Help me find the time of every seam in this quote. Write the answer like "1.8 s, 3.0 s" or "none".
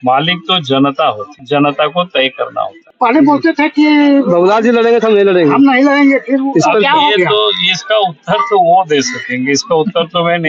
1.3 s, 2.8 s